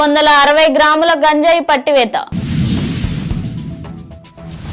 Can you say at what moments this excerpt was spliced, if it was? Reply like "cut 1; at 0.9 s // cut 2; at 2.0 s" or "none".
cut 1; at 2.3 s // cut 2; at 3.8 s